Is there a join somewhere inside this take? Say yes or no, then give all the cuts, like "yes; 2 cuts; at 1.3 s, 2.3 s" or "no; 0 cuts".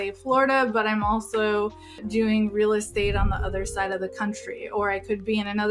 yes; 1 cut; at 1.9 s